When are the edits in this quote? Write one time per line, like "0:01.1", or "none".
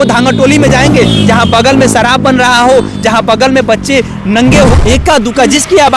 0:04.7